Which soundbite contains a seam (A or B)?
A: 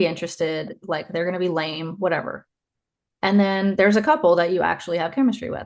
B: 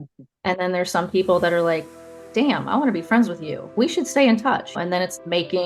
B